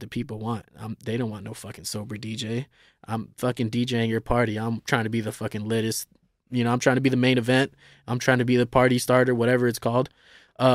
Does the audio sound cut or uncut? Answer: uncut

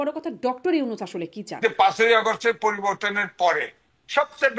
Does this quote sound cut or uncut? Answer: cut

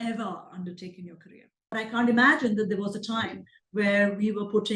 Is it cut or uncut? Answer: cut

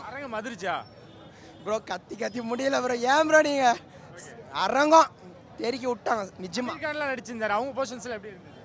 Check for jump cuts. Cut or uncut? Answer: uncut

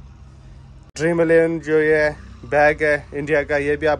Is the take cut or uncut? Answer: cut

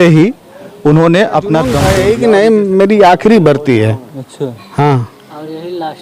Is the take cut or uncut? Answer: cut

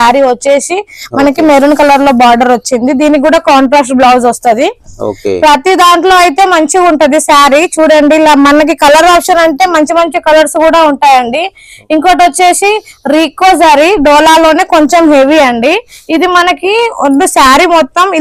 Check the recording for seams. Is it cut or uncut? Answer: uncut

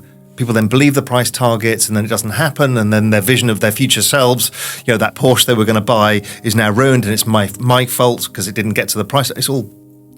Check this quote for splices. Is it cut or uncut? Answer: uncut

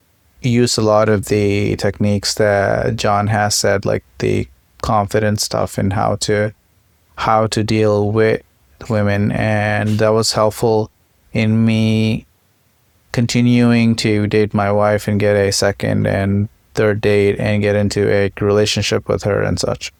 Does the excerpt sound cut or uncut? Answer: uncut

